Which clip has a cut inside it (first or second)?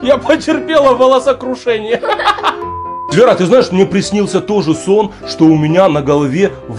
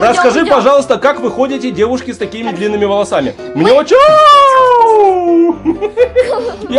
first